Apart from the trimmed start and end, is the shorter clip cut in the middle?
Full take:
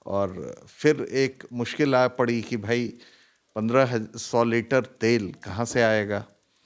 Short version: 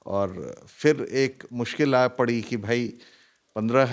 no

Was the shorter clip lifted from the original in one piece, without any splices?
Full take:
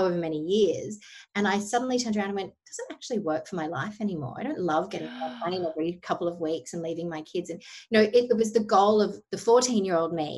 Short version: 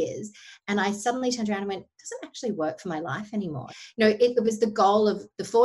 no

